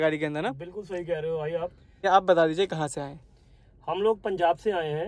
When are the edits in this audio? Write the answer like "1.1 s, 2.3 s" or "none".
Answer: 2.0 s